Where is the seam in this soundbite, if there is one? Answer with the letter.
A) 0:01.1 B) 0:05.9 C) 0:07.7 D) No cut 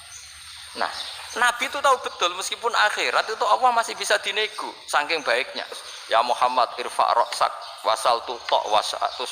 B